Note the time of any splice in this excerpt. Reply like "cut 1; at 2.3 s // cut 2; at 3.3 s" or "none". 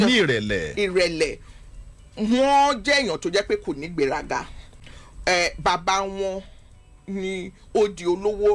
none